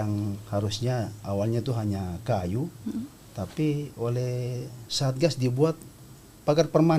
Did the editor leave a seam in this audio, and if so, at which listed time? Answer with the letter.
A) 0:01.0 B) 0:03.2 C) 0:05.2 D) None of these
D